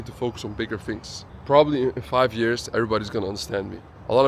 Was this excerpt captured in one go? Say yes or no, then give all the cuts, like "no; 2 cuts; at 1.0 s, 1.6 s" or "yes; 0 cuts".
no; 1 cut; at 1.3 s